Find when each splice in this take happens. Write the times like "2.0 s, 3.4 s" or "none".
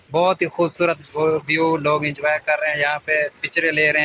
none